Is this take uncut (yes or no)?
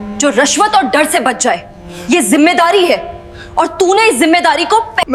yes